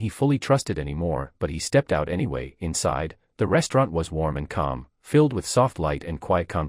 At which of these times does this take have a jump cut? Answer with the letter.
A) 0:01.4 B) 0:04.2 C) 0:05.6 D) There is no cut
D